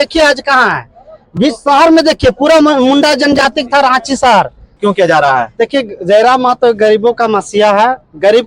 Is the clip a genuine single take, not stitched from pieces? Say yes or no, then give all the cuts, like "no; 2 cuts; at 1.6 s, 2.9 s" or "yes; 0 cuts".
no; 1 cut; at 4.8 s